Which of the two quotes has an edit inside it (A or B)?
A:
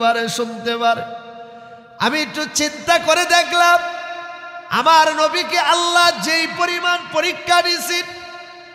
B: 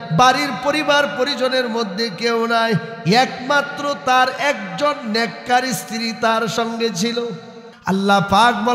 B